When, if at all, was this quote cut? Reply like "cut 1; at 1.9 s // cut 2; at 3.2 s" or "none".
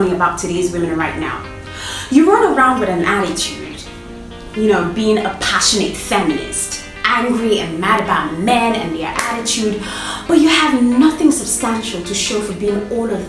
none

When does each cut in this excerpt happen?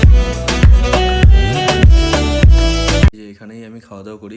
cut 1; at 3.1 s

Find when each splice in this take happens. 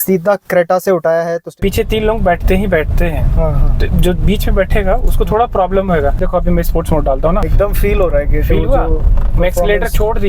cut 1; at 1.5 s // cut 2; at 6.2 s // cut 3; at 7.5 s

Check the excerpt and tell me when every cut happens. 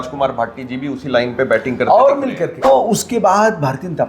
cut 1; at 2.6 s

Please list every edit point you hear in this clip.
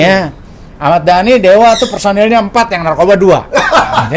none

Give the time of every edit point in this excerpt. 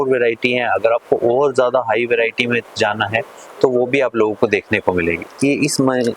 cut 1; at 5.2 s

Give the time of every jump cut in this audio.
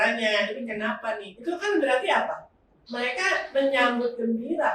cut 1; at 1.3 s

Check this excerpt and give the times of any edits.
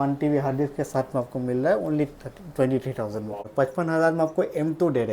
cut 1; at 3.5 s

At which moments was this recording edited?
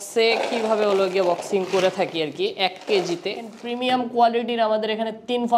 cut 1; at 3.6 s

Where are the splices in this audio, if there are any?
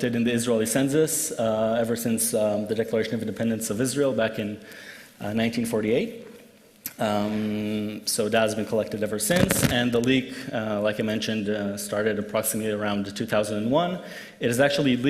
cut 1; at 9.5 s

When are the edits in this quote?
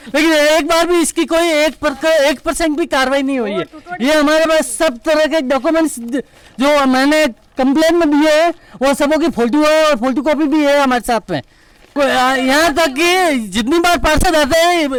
none

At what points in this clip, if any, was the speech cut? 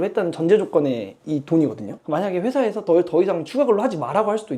none

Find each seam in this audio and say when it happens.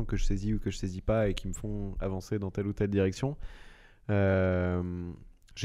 none

